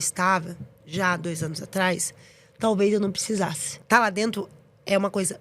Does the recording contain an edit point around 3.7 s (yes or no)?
yes